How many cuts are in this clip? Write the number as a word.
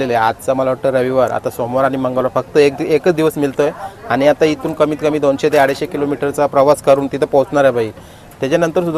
zero